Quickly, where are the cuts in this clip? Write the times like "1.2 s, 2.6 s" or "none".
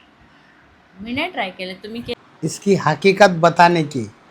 2.1 s

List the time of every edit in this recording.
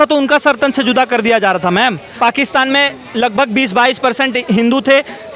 2.1 s

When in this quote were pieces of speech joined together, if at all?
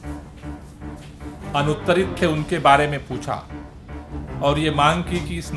1.5 s

